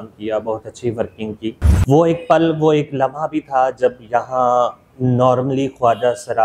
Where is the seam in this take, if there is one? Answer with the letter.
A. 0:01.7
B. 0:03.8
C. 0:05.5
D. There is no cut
A